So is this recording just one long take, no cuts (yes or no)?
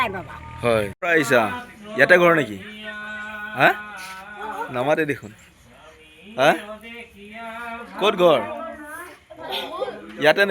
no